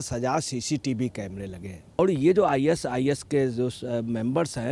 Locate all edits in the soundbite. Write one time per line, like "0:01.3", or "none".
0:02.0